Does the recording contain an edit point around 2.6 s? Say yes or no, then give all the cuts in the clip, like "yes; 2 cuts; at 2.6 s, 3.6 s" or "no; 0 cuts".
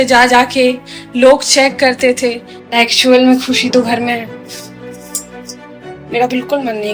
yes; 1 cut; at 2.6 s